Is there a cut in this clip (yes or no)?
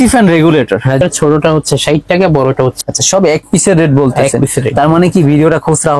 yes